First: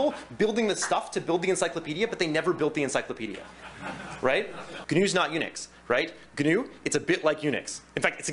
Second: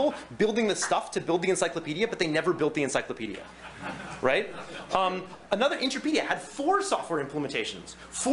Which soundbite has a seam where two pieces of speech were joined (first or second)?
first